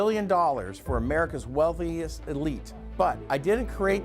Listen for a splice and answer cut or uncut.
cut